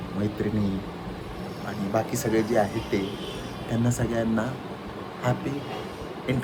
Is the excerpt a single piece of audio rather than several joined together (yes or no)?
yes